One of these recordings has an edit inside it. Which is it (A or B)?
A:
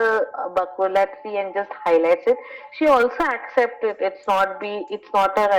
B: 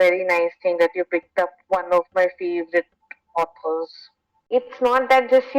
B